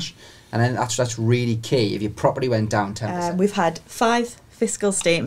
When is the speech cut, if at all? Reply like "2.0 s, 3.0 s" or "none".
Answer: 3.0 s